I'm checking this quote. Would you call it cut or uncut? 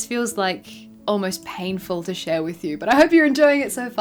uncut